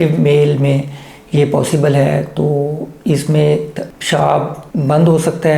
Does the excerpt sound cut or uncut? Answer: cut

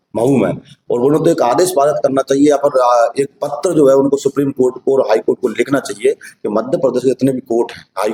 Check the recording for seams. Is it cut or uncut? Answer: uncut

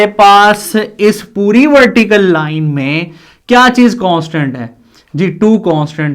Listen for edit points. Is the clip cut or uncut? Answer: uncut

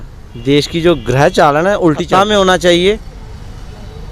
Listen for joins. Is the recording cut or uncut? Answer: cut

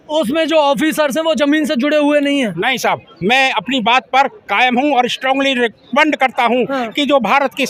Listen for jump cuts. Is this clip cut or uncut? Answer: uncut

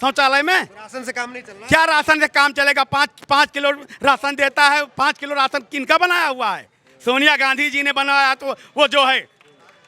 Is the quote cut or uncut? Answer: uncut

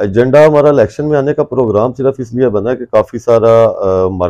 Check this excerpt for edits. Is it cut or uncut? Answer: uncut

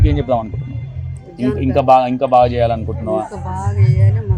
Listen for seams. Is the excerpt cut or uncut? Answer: uncut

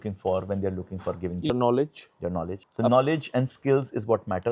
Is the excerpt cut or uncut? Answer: uncut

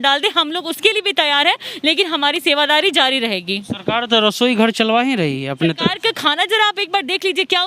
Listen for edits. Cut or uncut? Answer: uncut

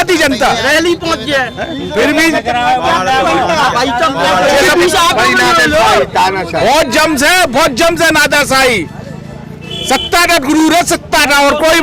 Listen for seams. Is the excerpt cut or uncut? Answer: uncut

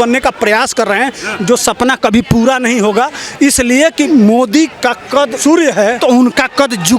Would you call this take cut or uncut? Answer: cut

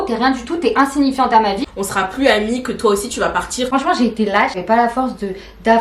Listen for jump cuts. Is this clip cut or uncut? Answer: cut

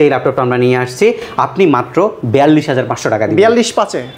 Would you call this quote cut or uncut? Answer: uncut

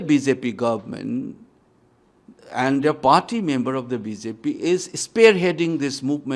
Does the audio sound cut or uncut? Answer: uncut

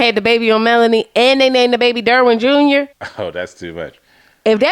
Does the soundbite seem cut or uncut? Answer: cut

